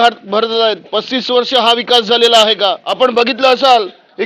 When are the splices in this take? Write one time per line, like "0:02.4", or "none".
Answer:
0:02.8